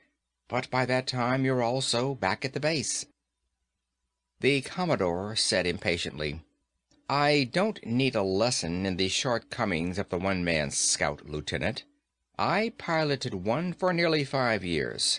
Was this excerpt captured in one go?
yes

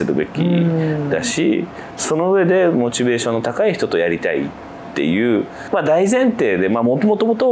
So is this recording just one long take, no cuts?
yes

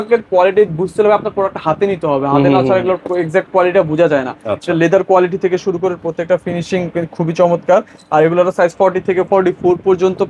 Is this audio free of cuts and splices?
yes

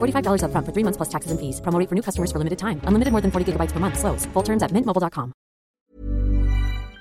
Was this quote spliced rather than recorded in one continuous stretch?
yes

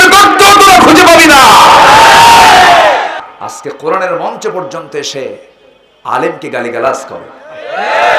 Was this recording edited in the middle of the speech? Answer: yes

